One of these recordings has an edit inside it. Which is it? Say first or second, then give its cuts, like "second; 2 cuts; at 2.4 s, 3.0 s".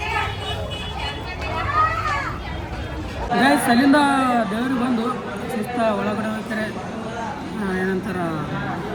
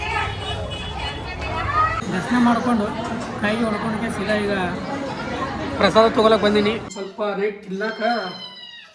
second; 2 cuts; at 2.0 s, 6.9 s